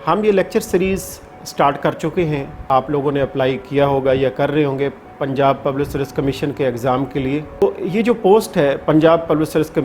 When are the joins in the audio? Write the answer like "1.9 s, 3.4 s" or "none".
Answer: 2.6 s, 7.6 s